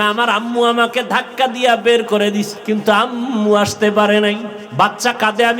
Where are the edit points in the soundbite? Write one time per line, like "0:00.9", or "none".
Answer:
0:02.6
0:04.6